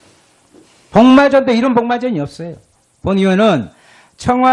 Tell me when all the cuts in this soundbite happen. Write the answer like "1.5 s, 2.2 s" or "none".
none